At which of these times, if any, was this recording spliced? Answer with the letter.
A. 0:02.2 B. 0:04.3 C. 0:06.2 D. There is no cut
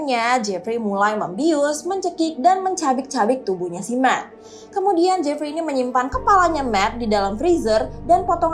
D